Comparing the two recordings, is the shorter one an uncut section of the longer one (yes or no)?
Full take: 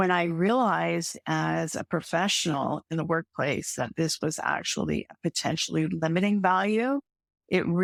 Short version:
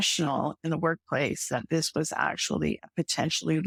yes